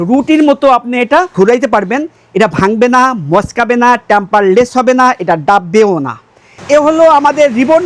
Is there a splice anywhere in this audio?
yes; 1 cut; at 6.5 s

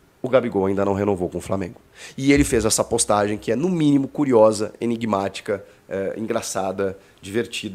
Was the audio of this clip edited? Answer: no; 0 cuts

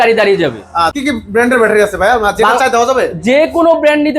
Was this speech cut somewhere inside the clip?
yes; 1 cut; at 0.9 s

